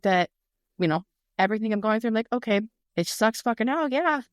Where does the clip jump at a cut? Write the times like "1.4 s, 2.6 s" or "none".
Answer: 2.8 s